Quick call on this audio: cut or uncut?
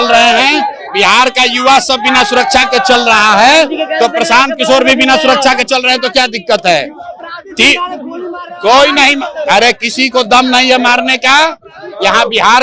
uncut